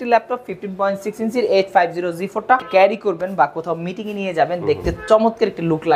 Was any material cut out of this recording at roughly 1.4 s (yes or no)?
no